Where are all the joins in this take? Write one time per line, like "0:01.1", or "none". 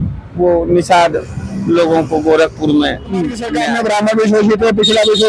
0:03.5